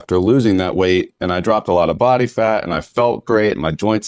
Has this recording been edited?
no; 0 cuts

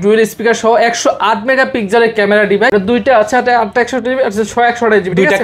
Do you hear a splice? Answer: yes; 1 cut; at 2.7 s

